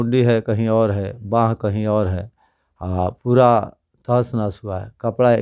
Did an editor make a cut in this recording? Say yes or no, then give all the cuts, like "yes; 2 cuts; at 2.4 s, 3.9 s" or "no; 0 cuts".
no; 0 cuts